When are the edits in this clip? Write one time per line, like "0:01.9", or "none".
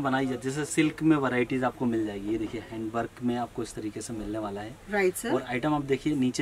none